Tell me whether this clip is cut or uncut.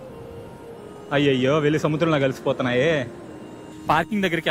cut